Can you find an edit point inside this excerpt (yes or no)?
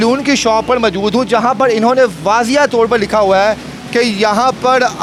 no